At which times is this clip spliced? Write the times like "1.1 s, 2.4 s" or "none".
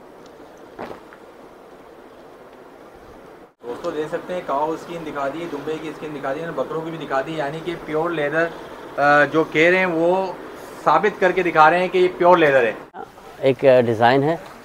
3.6 s, 13.1 s